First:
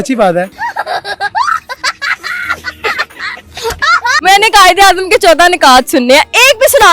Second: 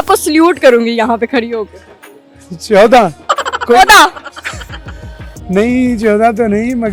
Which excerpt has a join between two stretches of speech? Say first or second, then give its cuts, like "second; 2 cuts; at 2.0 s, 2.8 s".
first; 1 cut; at 4.2 s